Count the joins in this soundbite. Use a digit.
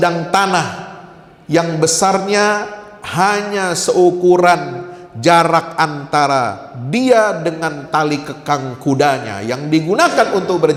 0